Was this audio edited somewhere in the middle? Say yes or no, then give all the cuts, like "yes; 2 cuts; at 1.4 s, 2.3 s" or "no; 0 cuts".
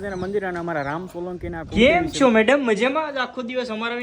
yes; 1 cut; at 1.7 s